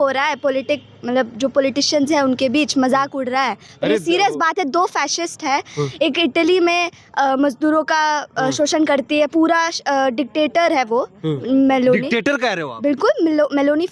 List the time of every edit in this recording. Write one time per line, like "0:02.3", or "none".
none